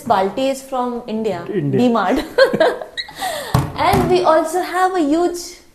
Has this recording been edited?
no; 0 cuts

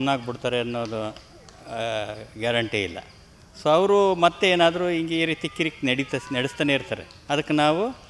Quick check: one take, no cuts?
yes; 0 cuts

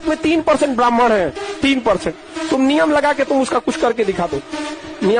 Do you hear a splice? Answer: no; 0 cuts

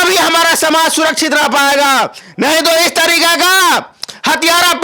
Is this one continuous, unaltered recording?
yes; 0 cuts

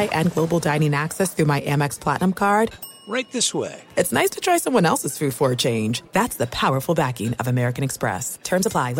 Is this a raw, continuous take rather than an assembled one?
yes; 0 cuts

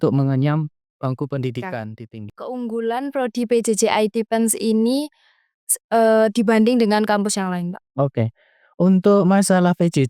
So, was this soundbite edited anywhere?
yes; 1 cut; at 2.3 s

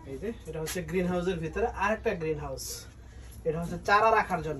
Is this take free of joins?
yes; 0 cuts

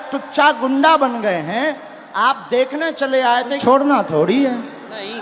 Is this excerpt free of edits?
no; 1 cut; at 3.6 s

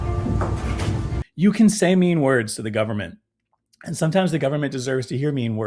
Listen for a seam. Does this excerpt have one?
yes; 1 cut; at 1.2 s

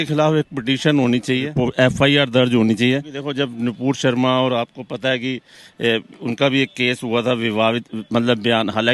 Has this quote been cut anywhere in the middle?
yes; 2 cuts; at 1.6 s, 3.2 s

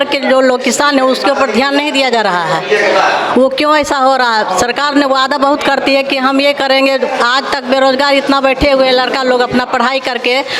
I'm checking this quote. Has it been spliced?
no; 0 cuts

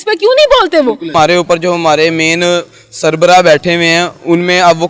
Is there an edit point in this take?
yes; 1 cut; at 1.1 s

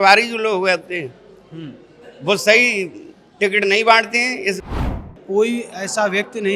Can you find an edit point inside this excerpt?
yes; 1 cut; at 5.0 s

